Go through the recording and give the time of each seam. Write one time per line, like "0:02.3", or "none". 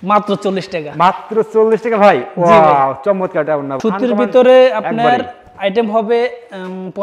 0:03.8